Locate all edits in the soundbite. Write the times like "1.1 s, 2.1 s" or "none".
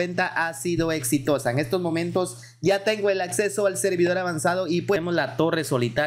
5.0 s